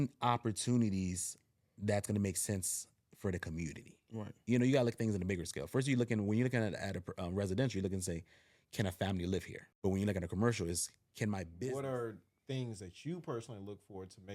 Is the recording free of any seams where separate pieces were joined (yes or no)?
no